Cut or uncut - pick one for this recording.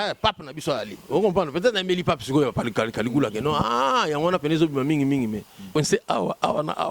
cut